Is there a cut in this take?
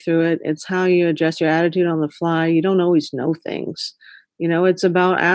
no; 0 cuts

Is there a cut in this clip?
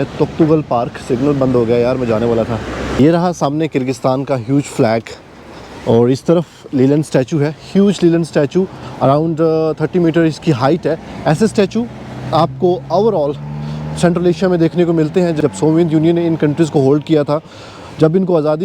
yes; 1 cut; at 2.8 s

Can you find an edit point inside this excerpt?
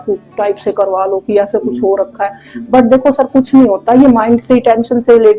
no; 0 cuts

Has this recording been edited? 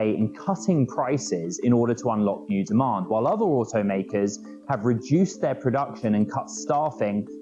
no; 0 cuts

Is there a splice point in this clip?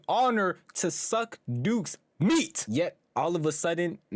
no; 0 cuts

